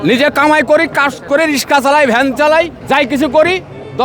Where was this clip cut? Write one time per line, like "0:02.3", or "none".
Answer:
0:02.8